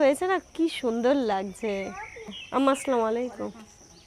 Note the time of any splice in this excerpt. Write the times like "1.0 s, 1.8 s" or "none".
2.4 s